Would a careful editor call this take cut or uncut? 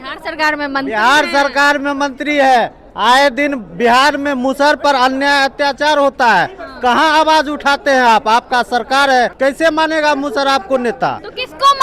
cut